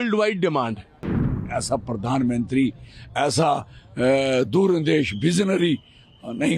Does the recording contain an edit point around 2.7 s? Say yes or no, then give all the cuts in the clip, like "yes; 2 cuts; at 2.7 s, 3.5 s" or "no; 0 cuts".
no; 1 cut; at 1.4 s